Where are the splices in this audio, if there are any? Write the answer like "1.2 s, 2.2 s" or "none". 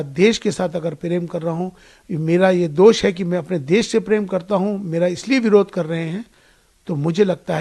none

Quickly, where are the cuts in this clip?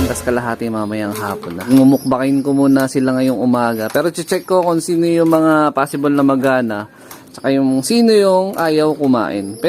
1.7 s

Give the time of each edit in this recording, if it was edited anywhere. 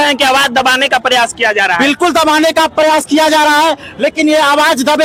none

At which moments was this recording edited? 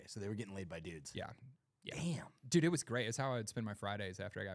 none

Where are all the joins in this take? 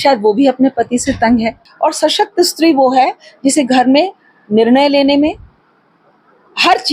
1.6 s

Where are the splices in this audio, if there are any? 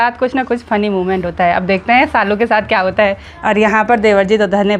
3.3 s

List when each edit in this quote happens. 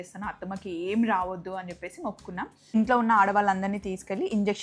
2.7 s

